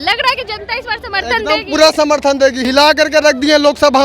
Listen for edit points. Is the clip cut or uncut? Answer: cut